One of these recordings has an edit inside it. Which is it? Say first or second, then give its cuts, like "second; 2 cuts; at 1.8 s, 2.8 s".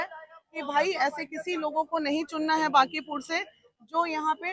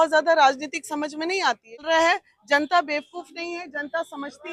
second; 1 cut; at 1.8 s